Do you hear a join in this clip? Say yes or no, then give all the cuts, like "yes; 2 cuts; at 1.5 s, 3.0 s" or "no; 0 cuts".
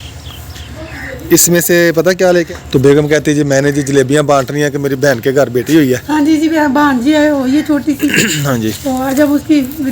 yes; 2 cuts; at 2.5 s, 6.5 s